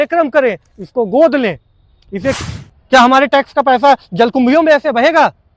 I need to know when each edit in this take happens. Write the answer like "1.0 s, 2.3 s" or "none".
2.4 s